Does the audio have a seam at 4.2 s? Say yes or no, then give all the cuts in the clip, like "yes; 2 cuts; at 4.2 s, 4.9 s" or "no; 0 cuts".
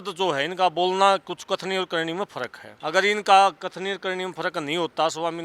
no; 1 cut; at 2.6 s